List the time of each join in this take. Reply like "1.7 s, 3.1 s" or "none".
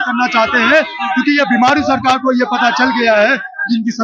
none